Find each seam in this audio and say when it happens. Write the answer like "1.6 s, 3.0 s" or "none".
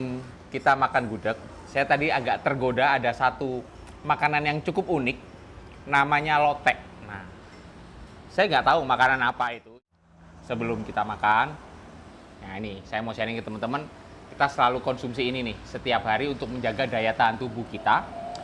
9.6 s